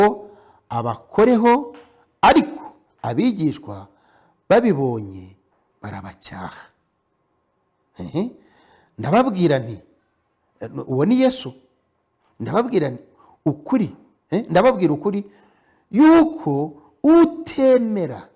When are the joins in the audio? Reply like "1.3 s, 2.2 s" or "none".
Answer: none